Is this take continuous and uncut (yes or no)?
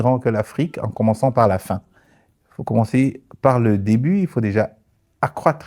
yes